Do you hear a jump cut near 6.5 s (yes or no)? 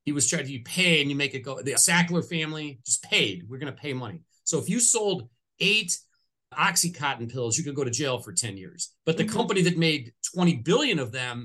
yes